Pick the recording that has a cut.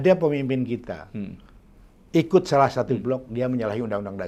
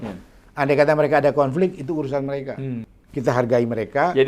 second; 1 cut; at 3.0 s

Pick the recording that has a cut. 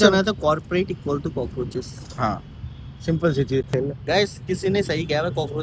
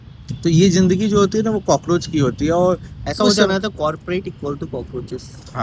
first; 1 cut; at 3.7 s

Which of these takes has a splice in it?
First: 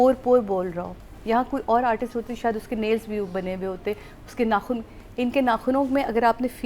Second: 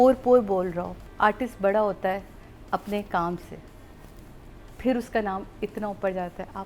second; 1 cut; at 1.0 s

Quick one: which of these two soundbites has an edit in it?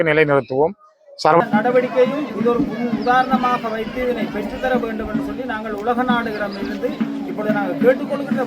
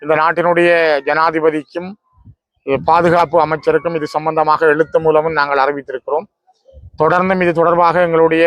first; 1 cut; at 1.4 s

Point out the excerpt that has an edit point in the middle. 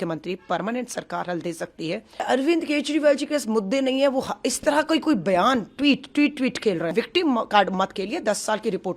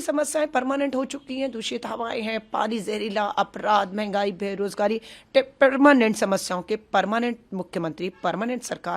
first; 2 cuts; at 2.2 s, 6.9 s

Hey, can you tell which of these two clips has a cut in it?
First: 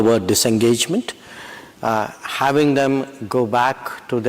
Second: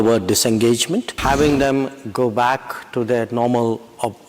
second; 1 cut; at 1.1 s

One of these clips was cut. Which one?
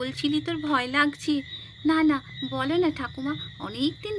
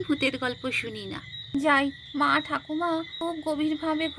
second; 2 cuts; at 1.3 s, 3.1 s

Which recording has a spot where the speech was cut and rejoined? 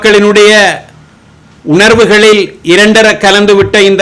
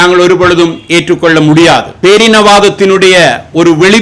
second; 1 cut; at 1.9 s

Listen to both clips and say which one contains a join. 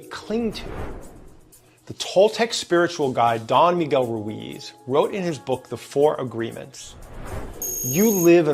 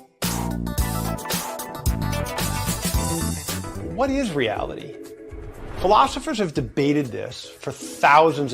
second; 1 cut; at 3.8 s

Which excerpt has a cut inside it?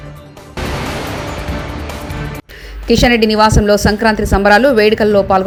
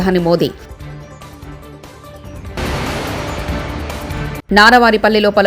second; 2 cuts; at 0.9 s, 2.6 s

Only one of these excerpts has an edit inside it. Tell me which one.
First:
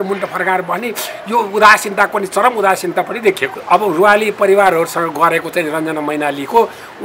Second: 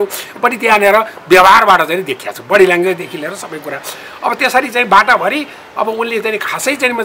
first; 1 cut; at 3.5 s

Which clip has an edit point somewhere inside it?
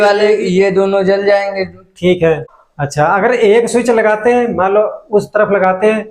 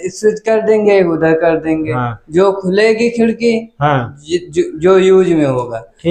first; 1 cut; at 2.5 s

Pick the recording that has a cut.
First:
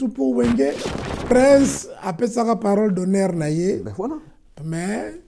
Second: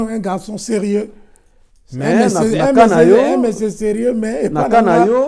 first; 1 cut; at 1.3 s

